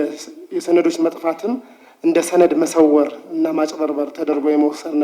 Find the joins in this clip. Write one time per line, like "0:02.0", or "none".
none